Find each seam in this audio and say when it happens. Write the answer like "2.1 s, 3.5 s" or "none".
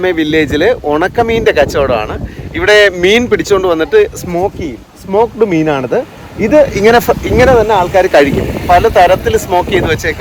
none